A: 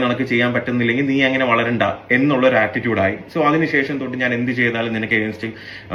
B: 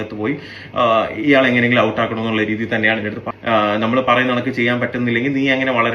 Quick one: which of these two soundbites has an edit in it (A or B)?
B